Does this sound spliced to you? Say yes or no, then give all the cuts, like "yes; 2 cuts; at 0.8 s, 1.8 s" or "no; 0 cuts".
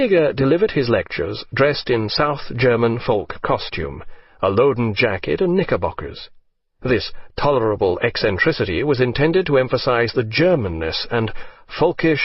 yes; 1 cut; at 1.4 s